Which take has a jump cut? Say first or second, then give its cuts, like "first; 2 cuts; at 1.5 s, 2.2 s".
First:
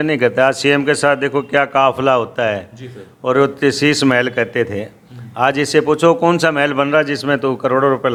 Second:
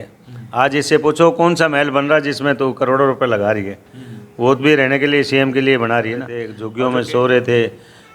second; 1 cut; at 6.6 s